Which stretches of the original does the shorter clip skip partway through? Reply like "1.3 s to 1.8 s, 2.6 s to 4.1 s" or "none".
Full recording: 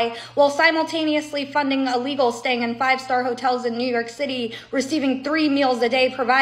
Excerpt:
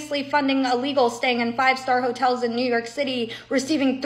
none